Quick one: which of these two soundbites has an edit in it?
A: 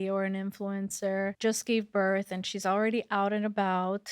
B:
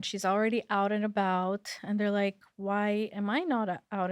A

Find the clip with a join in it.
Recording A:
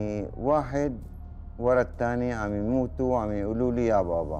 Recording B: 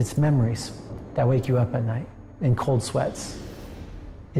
B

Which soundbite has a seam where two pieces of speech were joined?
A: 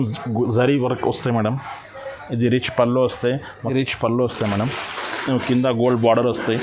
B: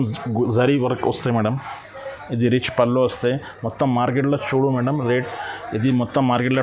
A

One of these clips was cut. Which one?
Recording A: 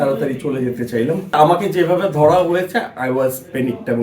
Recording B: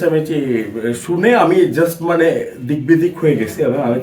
A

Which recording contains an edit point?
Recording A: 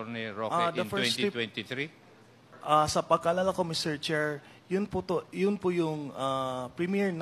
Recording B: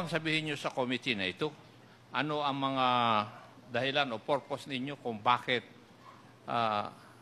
A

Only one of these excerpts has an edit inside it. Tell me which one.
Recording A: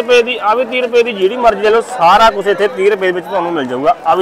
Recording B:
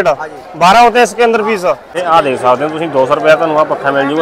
B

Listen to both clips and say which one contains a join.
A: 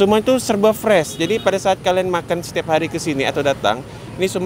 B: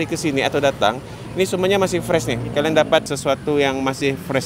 B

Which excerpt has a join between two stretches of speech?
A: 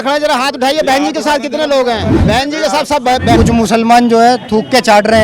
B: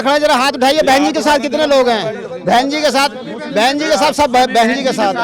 A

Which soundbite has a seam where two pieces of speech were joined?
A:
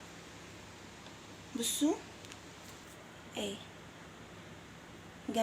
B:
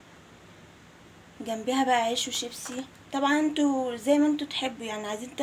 A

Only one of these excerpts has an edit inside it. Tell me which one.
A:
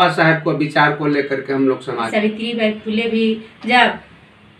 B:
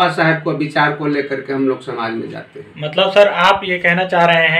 A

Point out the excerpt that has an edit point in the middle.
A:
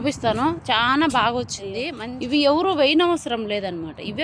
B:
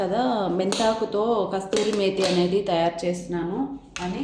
A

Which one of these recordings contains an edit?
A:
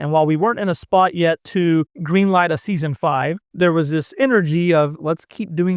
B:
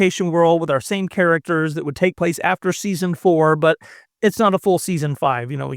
A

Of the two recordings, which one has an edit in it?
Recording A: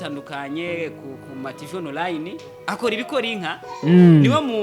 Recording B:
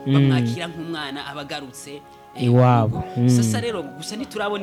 A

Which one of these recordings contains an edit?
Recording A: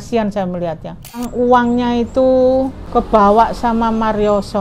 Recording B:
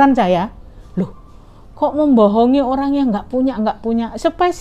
A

